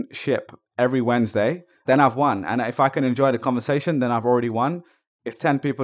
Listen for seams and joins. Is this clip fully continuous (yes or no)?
no